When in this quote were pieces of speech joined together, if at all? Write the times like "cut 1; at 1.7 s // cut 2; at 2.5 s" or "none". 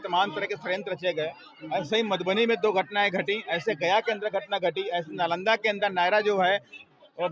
none